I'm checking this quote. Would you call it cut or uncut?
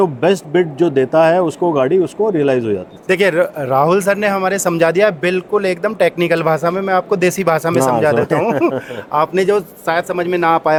uncut